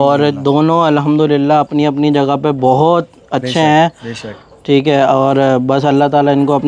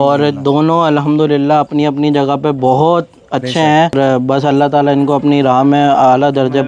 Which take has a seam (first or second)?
second